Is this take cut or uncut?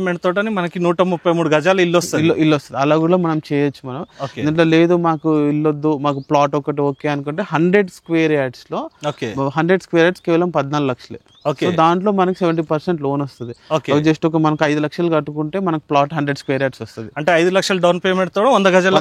uncut